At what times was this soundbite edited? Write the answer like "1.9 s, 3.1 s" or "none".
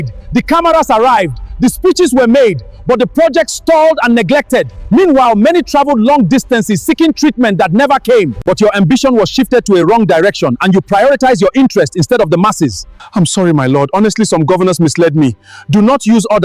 8.4 s